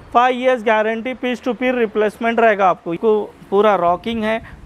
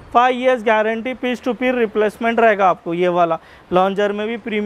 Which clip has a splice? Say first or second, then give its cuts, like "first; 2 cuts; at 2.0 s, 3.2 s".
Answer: first; 1 cut; at 3.0 s